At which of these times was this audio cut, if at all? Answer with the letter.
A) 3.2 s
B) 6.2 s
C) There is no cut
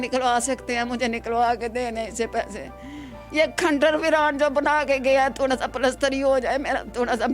A